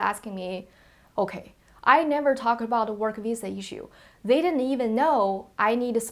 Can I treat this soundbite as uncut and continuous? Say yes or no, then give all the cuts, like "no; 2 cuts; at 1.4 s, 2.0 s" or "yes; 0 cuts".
yes; 0 cuts